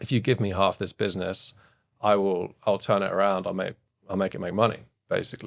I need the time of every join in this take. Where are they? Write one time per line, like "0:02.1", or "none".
none